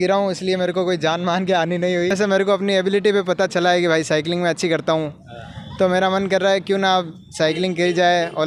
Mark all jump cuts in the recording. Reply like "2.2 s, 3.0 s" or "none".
2.1 s